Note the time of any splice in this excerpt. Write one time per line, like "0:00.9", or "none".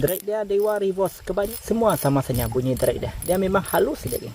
0:01.6